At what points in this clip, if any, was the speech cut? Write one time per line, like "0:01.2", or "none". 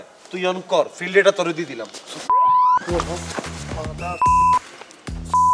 none